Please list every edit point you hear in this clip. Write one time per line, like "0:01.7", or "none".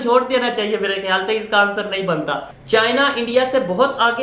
0:02.5